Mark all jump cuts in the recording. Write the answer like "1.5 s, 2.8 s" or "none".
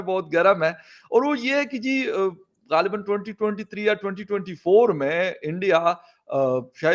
none